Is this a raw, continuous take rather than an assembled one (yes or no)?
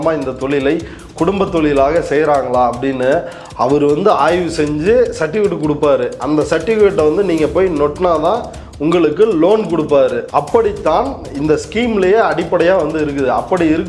no